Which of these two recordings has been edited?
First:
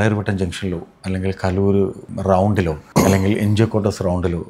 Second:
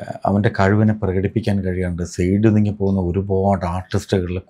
first; 2 cuts; at 2.1 s, 2.8 s

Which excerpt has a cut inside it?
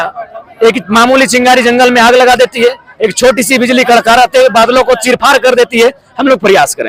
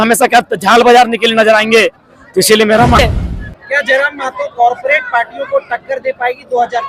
second; 1 cut; at 3.0 s

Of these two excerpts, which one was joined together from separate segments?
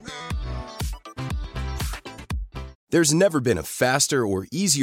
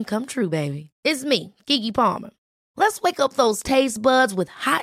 first; 1 cut; at 2.7 s

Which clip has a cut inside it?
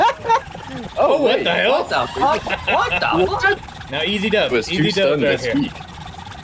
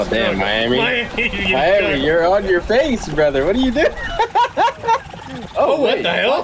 first; 1 cut; at 3.7 s

